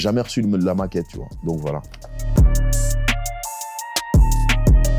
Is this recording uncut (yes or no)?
yes